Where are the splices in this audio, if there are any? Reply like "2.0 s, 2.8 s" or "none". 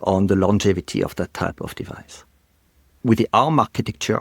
2.6 s